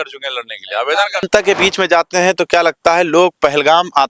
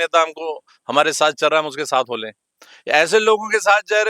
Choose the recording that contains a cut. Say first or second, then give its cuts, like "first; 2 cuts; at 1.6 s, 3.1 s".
first; 1 cut; at 1.3 s